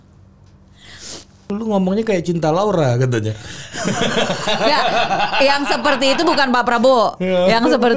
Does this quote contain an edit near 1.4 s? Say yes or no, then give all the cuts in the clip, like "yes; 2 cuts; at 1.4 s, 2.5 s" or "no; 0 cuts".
yes; 1 cut; at 1.4 s